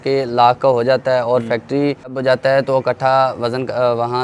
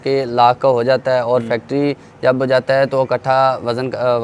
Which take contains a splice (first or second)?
first